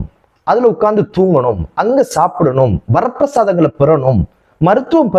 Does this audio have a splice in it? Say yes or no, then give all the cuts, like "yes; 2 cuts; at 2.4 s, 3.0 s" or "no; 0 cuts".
no; 0 cuts